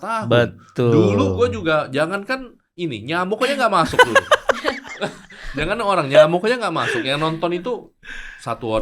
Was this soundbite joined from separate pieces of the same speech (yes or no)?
no